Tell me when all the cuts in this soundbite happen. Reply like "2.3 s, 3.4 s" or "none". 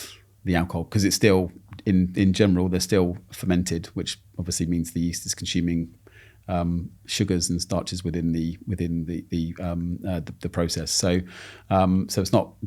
none